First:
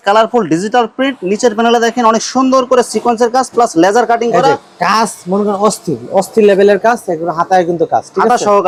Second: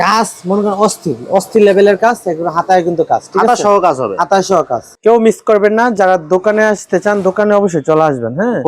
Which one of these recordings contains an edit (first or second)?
second